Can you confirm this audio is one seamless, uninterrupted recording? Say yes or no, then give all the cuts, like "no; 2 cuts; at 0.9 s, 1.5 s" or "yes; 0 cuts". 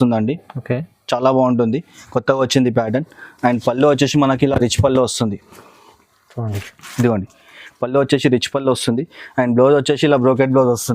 yes; 0 cuts